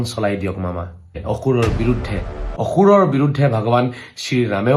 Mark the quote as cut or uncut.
cut